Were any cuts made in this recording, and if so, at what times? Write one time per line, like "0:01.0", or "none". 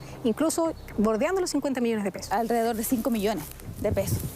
0:02.2